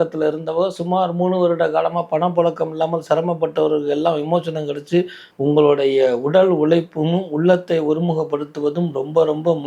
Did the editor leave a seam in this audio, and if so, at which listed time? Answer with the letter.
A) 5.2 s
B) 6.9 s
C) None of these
A